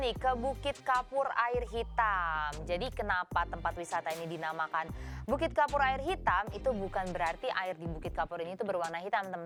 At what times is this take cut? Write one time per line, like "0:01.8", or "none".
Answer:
none